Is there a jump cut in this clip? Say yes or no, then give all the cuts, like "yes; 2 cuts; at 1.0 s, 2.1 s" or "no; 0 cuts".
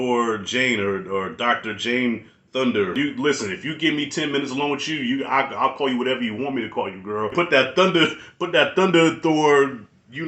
yes; 2 cuts; at 3.0 s, 7.3 s